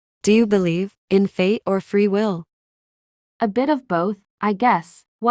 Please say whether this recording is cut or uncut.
cut